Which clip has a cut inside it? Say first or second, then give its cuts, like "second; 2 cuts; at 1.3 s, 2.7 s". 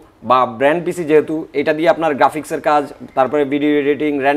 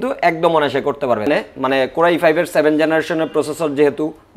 second; 1 cut; at 1.3 s